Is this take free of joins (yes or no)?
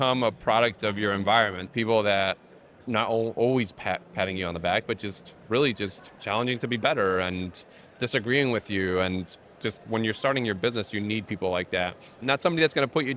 no